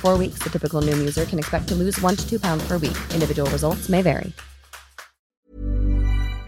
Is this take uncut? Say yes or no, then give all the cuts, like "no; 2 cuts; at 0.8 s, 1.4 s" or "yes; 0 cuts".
no; 1 cut; at 5.3 s